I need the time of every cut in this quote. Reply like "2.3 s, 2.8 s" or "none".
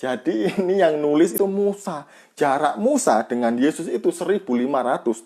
1.3 s